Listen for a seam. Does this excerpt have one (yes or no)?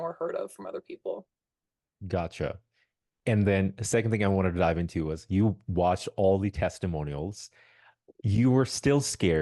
no